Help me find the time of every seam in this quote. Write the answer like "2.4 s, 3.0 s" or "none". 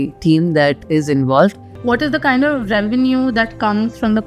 1.7 s